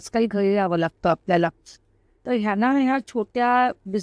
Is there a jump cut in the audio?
no; 0 cuts

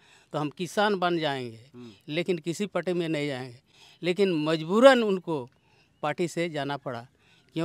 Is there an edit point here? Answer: no; 0 cuts

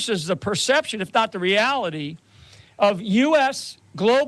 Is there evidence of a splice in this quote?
no; 0 cuts

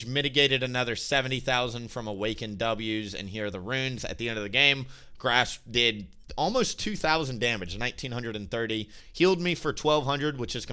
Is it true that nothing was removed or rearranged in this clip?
yes; 0 cuts

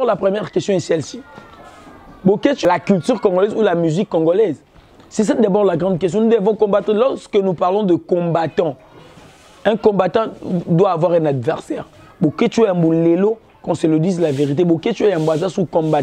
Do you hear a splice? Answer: yes; 1 cut; at 2.7 s

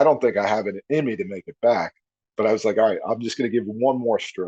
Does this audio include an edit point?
no; 0 cuts

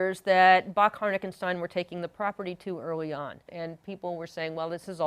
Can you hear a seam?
yes; 1 cut; at 3.5 s

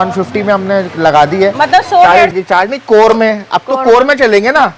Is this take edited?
yes; 1 cut; at 2.3 s

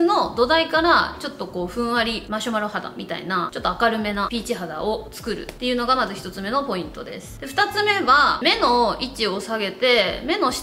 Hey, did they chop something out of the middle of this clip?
no; 0 cuts

